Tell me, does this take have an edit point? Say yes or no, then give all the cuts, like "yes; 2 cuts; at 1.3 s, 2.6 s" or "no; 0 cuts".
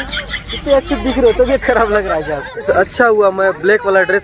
yes; 1 cut; at 2.5 s